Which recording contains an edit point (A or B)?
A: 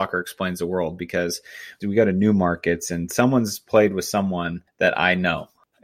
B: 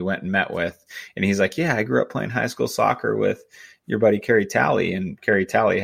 A